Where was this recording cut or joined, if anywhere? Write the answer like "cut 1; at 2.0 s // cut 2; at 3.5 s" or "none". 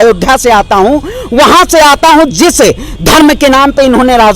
none